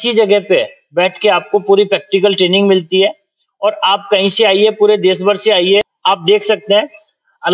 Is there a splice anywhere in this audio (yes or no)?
yes